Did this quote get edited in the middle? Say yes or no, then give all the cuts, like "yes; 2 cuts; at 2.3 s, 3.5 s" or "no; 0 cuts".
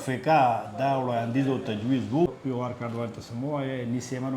yes; 1 cut; at 2.3 s